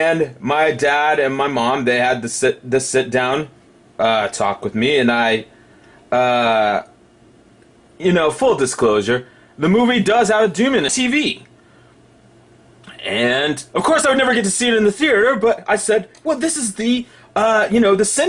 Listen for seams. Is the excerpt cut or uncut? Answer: uncut